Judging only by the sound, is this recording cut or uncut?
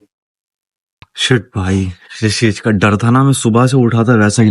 cut